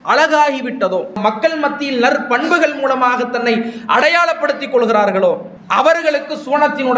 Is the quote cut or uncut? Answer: cut